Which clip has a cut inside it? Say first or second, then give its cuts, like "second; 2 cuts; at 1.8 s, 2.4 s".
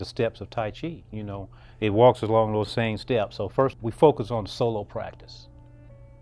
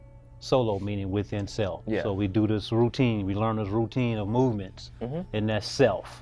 first; 1 cut; at 3.8 s